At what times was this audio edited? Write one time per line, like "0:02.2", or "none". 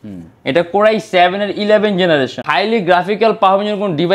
0:02.4